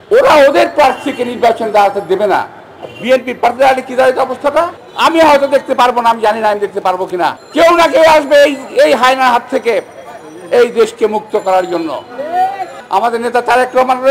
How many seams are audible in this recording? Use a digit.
3